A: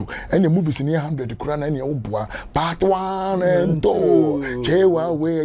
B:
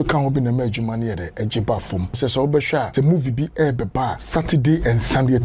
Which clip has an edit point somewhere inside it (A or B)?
B